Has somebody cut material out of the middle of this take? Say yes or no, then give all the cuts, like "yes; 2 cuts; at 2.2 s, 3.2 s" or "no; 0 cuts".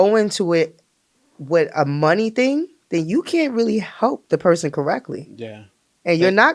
no; 0 cuts